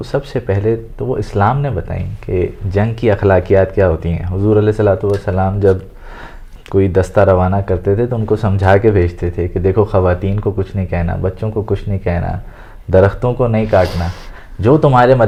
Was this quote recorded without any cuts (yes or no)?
yes